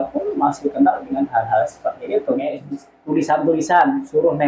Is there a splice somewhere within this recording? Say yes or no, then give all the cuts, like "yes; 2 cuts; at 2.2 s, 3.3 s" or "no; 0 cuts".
yes; 1 cut; at 2.6 s